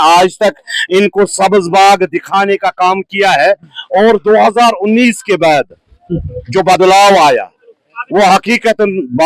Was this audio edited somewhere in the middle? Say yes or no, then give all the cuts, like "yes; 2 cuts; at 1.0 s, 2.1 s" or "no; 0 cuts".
no; 0 cuts